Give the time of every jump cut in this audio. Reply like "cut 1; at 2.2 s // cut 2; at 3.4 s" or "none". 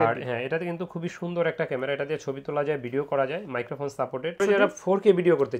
cut 1; at 4.4 s